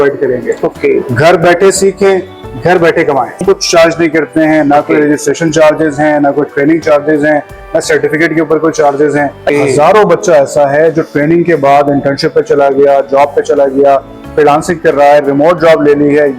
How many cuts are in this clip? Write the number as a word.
two